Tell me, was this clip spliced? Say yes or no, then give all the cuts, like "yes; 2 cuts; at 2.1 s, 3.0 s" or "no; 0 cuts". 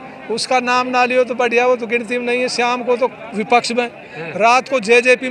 no; 0 cuts